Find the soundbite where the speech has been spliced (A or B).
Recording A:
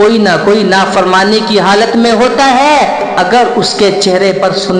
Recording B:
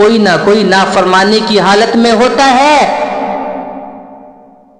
A